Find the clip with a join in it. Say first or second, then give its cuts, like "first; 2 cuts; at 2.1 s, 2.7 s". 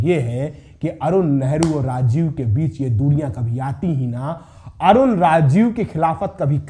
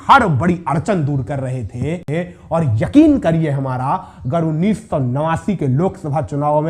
second; 1 cut; at 2.0 s